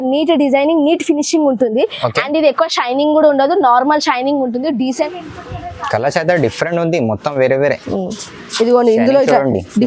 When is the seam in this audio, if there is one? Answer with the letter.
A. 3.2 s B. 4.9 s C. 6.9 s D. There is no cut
B